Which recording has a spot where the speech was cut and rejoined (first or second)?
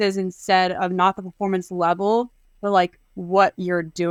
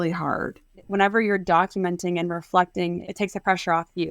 second